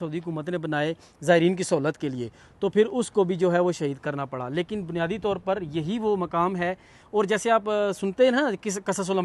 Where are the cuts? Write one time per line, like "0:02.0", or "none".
none